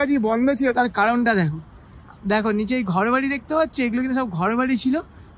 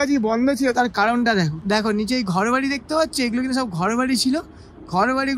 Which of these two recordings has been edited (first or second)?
second